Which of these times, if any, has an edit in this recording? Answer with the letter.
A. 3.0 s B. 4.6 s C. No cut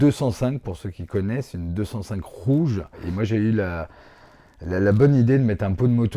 A